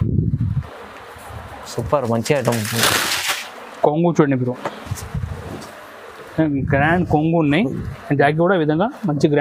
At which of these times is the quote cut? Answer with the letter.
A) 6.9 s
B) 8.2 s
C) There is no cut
C